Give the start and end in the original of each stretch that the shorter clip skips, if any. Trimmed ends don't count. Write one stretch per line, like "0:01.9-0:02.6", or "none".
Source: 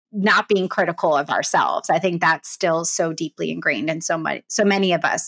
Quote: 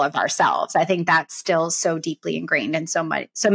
none